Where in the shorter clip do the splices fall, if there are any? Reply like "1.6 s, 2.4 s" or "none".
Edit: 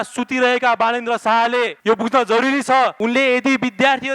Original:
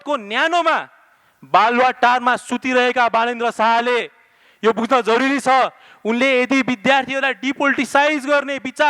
1.8 s, 3.0 s